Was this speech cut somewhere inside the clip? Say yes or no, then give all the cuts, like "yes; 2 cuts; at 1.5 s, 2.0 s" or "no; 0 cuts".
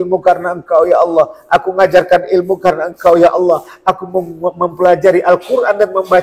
no; 0 cuts